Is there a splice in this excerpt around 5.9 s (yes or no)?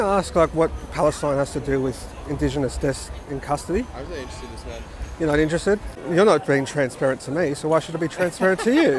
yes